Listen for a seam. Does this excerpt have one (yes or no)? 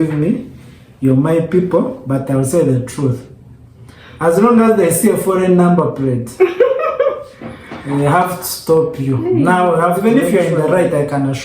yes